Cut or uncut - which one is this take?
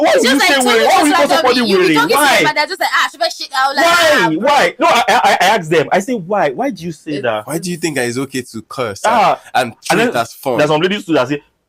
uncut